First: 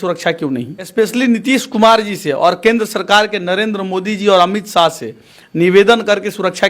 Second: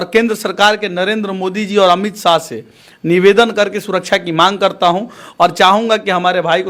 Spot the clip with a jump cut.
first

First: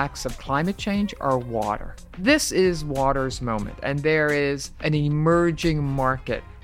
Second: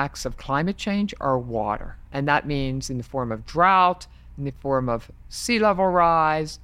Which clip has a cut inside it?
first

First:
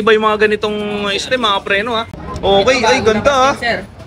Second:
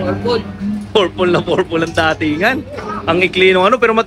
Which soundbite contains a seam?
first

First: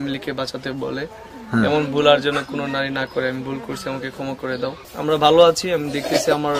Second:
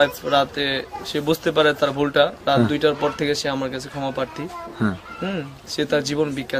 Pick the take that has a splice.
first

